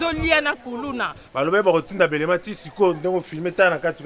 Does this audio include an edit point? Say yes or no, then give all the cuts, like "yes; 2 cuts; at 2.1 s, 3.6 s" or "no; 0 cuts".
yes; 1 cut; at 1.2 s